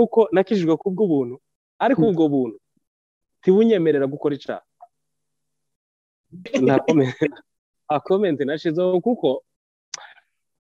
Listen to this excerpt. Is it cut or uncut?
cut